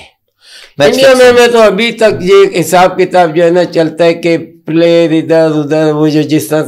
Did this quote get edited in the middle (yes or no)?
no